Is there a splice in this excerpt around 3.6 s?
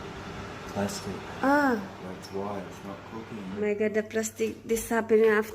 yes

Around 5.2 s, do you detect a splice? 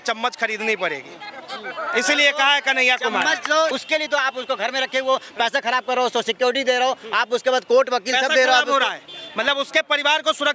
no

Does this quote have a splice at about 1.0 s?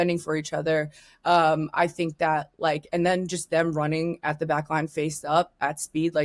no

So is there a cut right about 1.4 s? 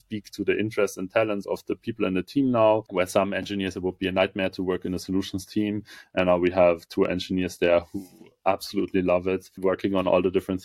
yes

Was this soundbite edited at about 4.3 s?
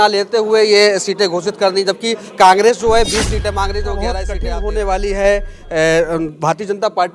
yes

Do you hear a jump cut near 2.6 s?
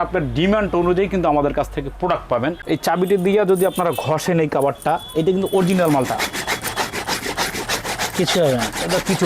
yes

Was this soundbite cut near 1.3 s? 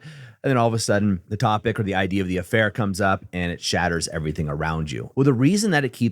yes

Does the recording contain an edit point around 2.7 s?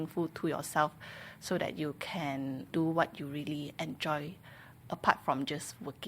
yes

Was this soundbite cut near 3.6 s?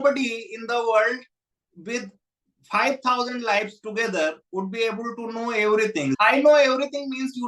no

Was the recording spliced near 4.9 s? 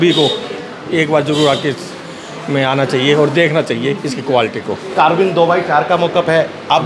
yes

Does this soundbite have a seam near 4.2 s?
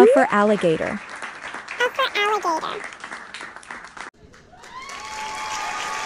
yes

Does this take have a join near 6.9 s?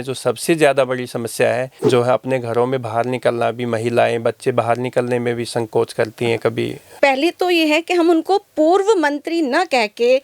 yes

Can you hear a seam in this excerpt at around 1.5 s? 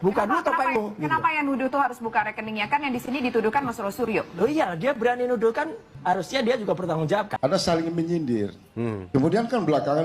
no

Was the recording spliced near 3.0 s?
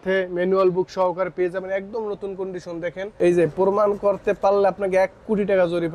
yes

